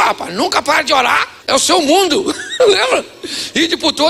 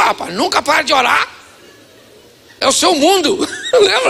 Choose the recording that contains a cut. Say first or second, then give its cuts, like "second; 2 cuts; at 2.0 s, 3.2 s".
first; 1 cut; at 1.3 s